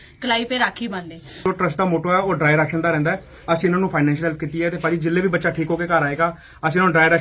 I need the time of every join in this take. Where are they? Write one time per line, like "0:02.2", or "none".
0:01.4